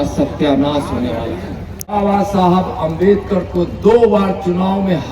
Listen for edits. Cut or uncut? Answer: cut